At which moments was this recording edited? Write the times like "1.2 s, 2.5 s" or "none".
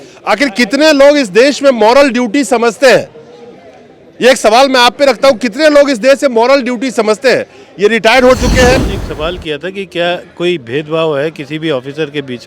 8.7 s